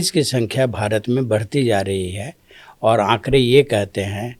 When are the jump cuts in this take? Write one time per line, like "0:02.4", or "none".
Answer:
none